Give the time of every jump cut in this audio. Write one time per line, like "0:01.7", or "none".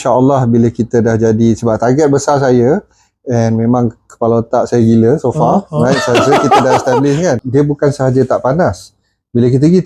0:07.4